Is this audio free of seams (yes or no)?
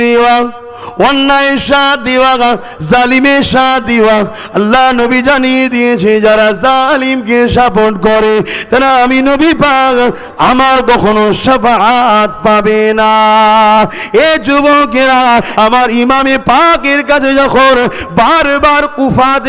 no